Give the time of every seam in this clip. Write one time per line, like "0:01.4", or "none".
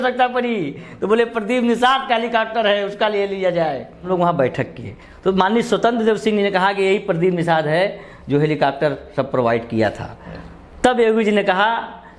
0:04.1